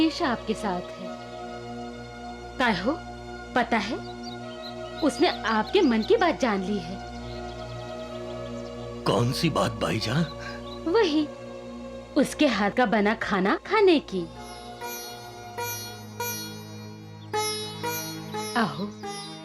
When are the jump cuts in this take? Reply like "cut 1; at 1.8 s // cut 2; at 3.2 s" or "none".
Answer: none

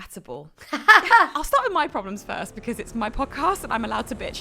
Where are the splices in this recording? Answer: cut 1; at 1.4 s

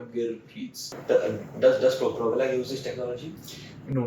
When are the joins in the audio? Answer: cut 1; at 0.9 s

